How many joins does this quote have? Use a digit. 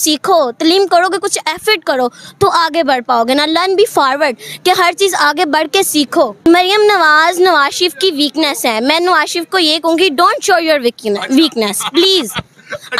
1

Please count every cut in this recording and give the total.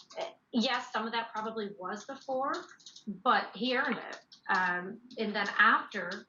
0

